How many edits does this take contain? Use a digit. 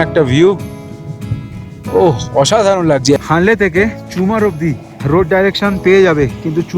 2